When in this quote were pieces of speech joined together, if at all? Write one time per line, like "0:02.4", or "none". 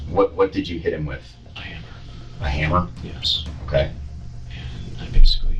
none